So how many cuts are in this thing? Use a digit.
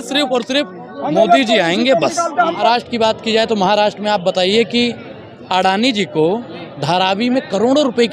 1